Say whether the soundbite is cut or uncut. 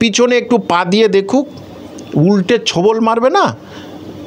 uncut